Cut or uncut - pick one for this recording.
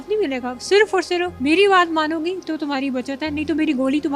cut